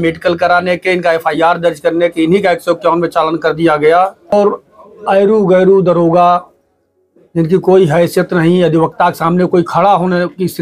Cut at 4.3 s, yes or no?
yes